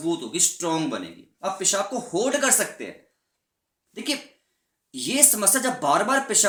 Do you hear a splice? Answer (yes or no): no